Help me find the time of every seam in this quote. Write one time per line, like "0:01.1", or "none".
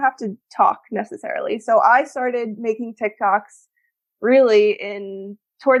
none